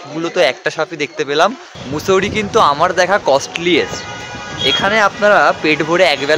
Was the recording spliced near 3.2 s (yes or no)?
no